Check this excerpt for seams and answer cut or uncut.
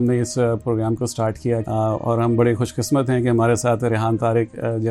cut